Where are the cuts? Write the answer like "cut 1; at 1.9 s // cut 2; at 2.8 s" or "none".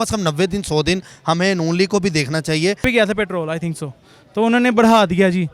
cut 1; at 2.8 s